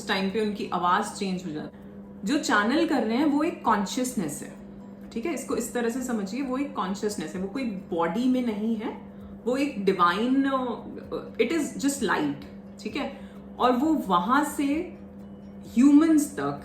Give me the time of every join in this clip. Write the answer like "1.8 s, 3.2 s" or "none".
1.7 s